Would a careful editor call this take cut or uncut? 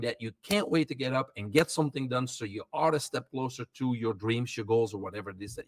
uncut